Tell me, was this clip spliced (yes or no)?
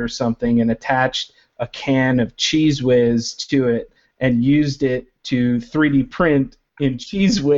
no